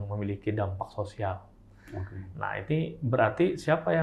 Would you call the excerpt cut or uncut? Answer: uncut